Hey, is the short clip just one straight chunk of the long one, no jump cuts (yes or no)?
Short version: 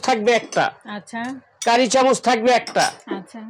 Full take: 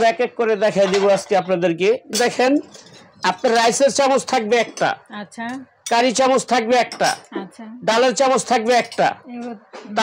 yes